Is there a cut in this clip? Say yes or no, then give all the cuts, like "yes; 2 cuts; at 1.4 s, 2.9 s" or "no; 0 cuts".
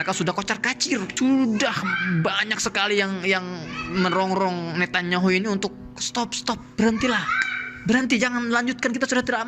yes; 1 cut; at 1.1 s